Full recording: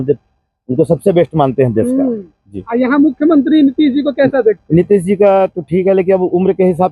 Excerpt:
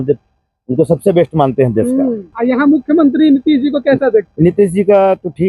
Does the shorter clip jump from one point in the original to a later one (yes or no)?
yes